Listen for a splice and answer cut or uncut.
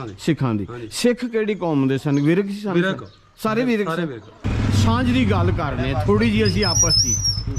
cut